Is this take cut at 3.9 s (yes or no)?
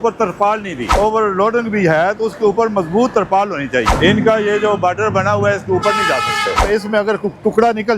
yes